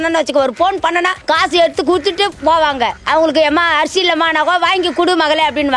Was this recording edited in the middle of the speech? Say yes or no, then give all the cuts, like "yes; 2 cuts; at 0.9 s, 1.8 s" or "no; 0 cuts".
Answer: yes; 3 cuts; at 1.2 s, 2.4 s, 3.0 s